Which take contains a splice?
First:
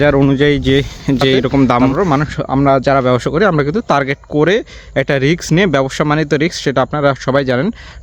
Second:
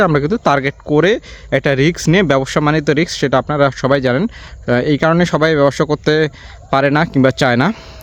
first; 1 cut; at 1.9 s

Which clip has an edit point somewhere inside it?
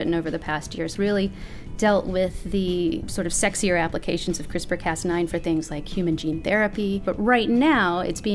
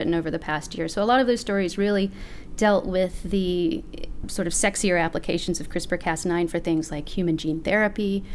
first; 3 cuts; at 0.9 s, 3.1 s, 7.1 s

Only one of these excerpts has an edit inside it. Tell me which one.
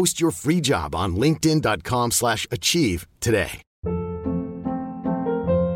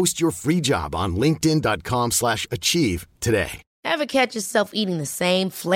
second; 1 cut; at 3.6 s

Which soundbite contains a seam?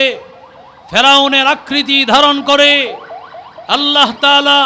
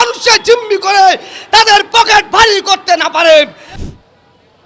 second; 1 cut; at 3.6 s

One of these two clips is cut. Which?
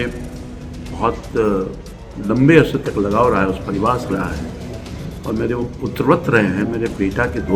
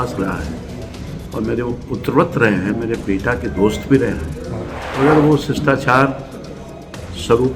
second; 1 cut; at 4.8 s

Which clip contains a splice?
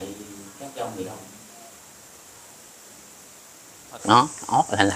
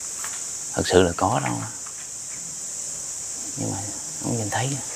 first; 1 cut; at 4.0 s

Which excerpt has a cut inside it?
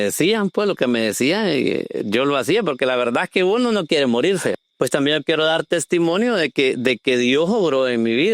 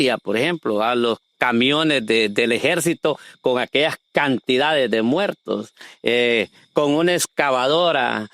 first; 1 cut; at 4.6 s

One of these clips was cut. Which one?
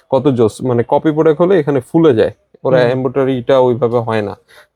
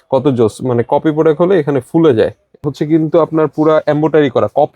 second; 1 cut; at 2.6 s

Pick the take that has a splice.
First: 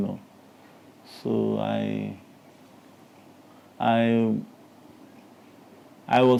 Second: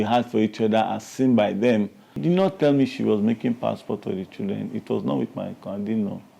second; 1 cut; at 2.2 s

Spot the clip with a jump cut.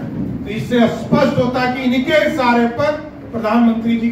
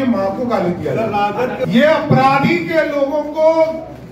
second; 1 cut; at 1.7 s

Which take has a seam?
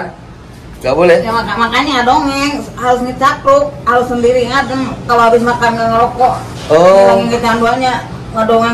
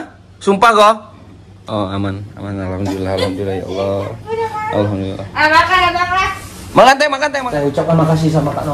second; 1 cut; at 7.2 s

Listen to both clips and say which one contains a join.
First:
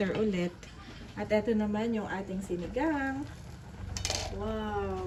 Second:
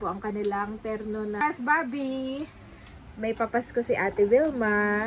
second; 1 cut; at 1.4 s

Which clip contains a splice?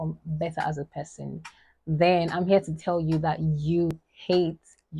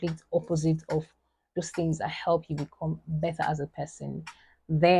first; 1 cut; at 3.9 s

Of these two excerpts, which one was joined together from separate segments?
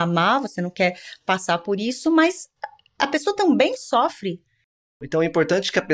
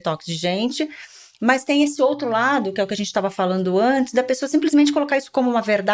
first; 1 cut; at 5.0 s

